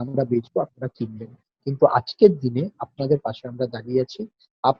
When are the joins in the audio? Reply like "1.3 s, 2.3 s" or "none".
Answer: none